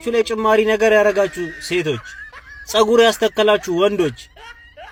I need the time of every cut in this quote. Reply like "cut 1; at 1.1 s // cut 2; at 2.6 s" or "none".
none